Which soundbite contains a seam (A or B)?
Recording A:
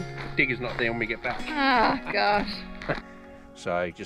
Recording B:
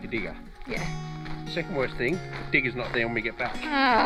A